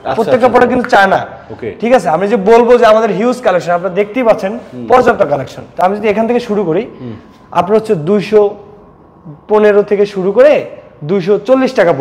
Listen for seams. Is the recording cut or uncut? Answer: uncut